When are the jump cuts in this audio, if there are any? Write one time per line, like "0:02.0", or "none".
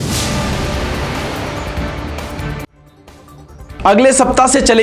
0:02.6

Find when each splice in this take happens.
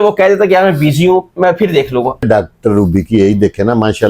0:02.2

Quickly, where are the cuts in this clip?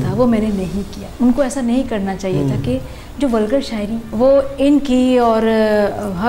0:01.0
0:04.1

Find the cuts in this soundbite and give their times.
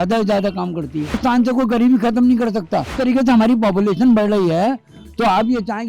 0:01.2
0:02.9

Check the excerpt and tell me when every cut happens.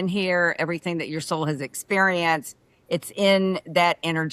none

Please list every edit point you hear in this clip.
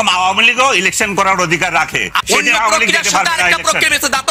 0:02.1

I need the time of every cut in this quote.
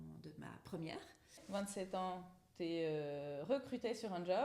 0:01.4

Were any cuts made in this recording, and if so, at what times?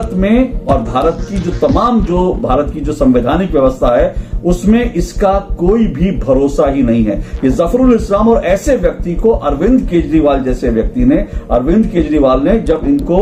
none

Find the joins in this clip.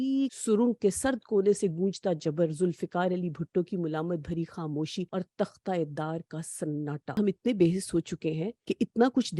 0:07.2
0:08.6

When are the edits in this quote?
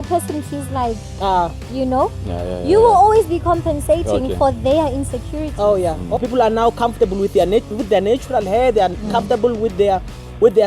0:06.2

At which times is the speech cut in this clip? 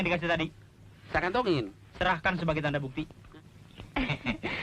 0:03.3

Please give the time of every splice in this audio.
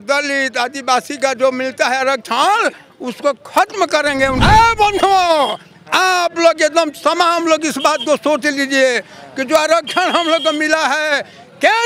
0:04.4

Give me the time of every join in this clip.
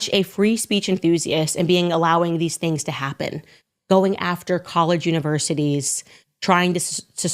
0:04.2

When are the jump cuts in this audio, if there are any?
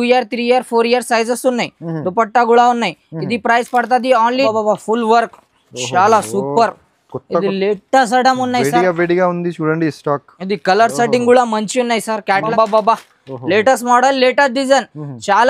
0:04.5
0:12.5

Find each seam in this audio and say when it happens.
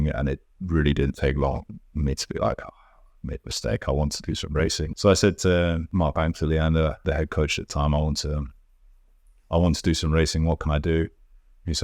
0:04.9
0:05.8
0:07.0

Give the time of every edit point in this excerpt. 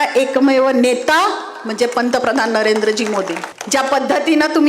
0:03.5

